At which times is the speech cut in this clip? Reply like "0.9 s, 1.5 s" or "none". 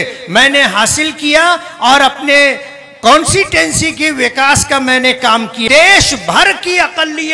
5.6 s